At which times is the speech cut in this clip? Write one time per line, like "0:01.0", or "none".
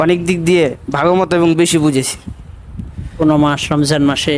0:03.2